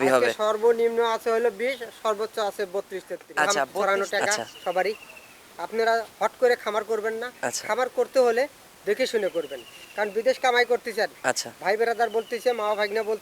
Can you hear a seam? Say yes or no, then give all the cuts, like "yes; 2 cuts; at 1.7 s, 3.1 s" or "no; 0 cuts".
yes; 1 cut; at 3.8 s